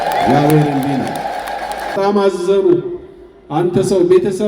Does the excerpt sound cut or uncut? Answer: cut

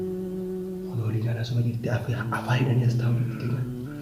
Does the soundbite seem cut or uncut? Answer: cut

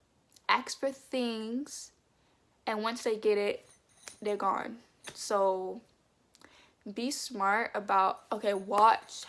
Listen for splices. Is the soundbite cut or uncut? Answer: uncut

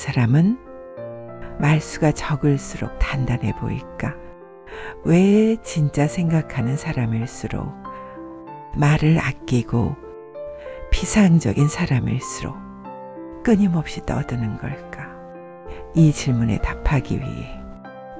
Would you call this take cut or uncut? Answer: uncut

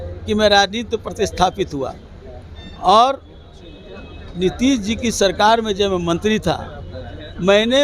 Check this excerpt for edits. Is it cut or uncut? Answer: uncut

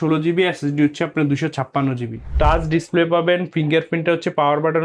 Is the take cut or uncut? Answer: cut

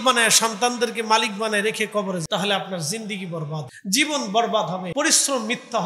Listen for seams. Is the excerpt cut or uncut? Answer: cut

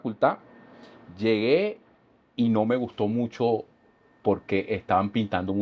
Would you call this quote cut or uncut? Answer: uncut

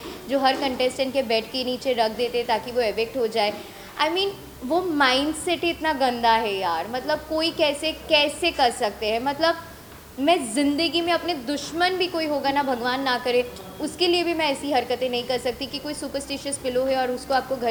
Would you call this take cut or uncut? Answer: uncut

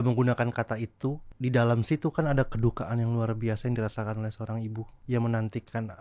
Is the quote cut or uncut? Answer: cut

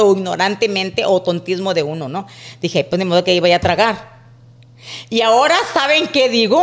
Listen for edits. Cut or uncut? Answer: uncut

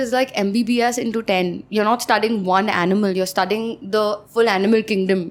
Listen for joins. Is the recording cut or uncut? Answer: uncut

